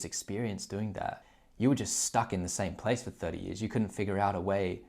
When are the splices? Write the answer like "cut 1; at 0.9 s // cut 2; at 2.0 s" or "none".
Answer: cut 1; at 1.2 s